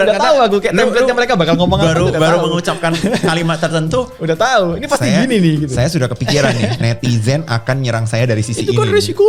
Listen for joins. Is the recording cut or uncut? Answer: uncut